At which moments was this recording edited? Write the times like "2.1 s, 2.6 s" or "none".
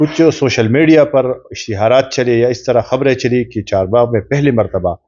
none